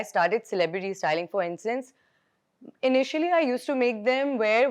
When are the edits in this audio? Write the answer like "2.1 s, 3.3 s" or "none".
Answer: none